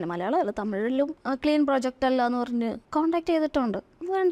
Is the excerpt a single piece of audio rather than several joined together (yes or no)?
no